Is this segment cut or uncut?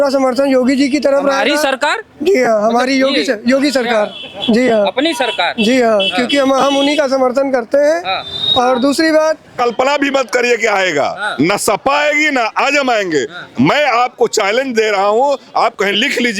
cut